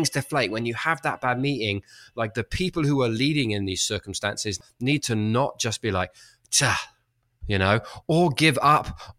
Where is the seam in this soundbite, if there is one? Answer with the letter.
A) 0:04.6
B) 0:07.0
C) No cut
A